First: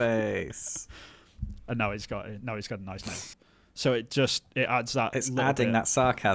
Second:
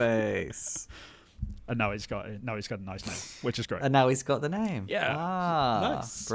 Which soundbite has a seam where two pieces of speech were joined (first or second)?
first